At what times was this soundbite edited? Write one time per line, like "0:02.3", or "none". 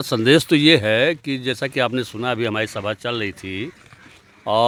none

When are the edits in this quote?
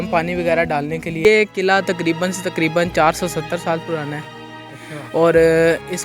0:01.2

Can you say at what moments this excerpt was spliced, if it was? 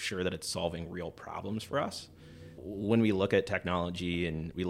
0:02.6

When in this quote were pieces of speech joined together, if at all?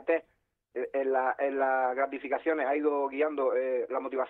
0:02.0

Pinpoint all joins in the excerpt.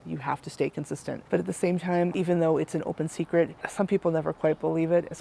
0:01.2
0:02.1

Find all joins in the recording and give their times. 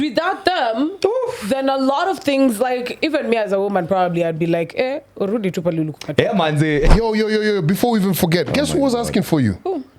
0:06.9

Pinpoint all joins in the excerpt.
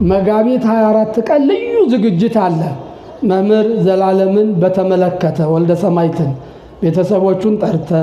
none

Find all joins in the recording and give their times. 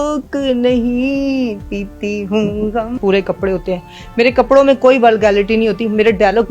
0:03.0

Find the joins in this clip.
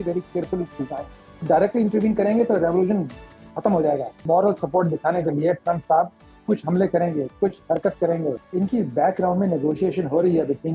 0:01.3
0:04.2
0:08.4

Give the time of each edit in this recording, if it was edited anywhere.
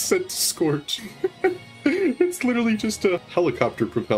0:01.0
0:03.2

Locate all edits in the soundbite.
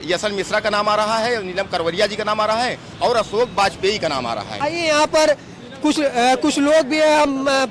0:04.6

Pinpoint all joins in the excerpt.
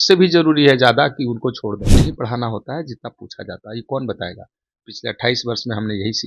0:01.8

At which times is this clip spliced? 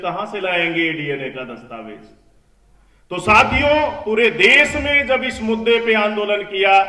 none

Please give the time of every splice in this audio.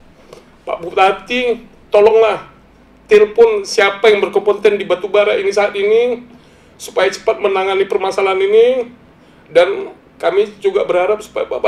none

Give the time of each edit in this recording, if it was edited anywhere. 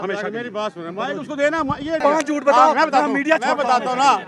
0:02.0

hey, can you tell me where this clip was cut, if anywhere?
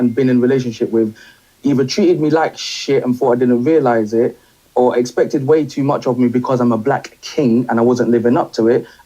0:03.8
0:07.1

